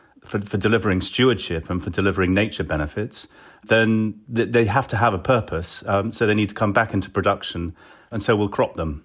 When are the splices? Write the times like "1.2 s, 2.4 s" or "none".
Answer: 8.1 s